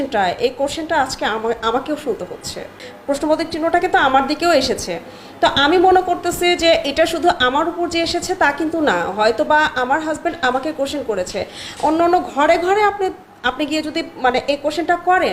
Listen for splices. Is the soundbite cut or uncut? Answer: cut